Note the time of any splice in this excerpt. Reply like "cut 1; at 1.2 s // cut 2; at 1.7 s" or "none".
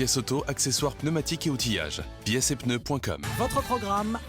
cut 1; at 3.2 s